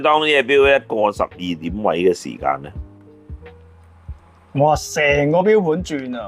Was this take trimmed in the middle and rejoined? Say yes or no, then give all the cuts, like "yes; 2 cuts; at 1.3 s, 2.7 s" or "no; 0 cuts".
no; 0 cuts